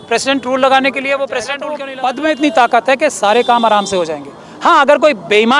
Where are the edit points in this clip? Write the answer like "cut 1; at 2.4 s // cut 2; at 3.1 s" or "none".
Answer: cut 1; at 1.7 s